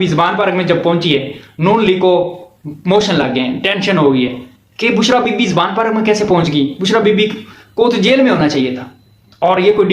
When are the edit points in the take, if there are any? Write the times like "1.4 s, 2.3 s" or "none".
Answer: none